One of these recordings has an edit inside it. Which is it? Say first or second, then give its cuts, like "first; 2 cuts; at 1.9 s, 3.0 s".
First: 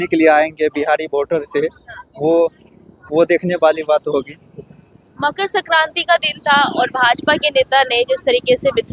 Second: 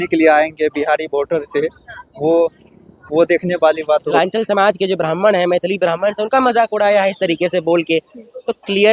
second; 1 cut; at 4.1 s